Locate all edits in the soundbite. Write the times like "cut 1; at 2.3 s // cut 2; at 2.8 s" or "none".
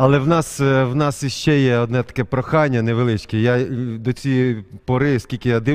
none